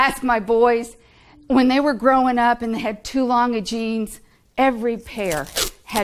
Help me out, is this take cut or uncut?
uncut